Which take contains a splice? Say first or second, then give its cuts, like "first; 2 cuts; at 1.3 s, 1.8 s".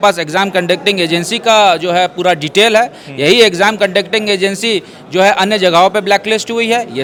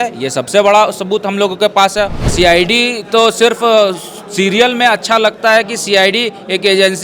second; 1 cut; at 2.3 s